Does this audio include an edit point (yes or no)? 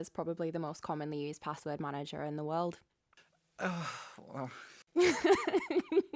no